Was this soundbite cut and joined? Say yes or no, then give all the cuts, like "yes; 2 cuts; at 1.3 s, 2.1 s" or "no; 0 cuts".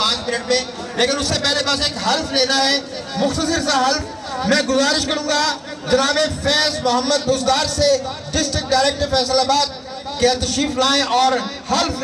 no; 0 cuts